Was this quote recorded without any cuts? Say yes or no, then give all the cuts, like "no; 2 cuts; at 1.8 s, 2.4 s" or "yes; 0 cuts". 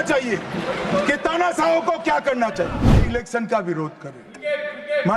no; 1 cut; at 3.0 s